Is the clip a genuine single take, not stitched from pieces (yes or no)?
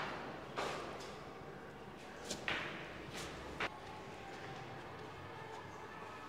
yes